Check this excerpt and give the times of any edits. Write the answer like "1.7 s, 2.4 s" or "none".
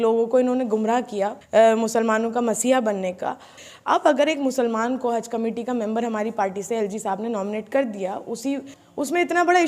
1.4 s, 3.7 s, 8.8 s